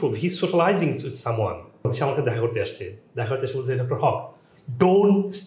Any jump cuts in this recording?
yes; 1 cut; at 1.9 s

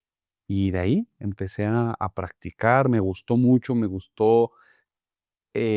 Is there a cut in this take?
no; 0 cuts

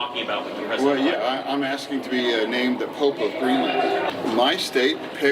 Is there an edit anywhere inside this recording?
yes; 1 cut; at 4.1 s

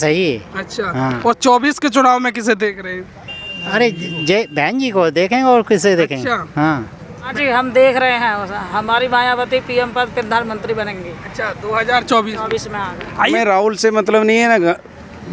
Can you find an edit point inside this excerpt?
yes; 2 cuts; at 7.3 s, 13.4 s

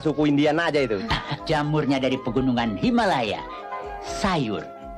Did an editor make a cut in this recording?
yes; 2 cuts; at 1.2 s, 3.8 s

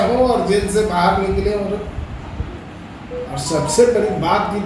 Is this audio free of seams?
no; 1 cut; at 2.6 s

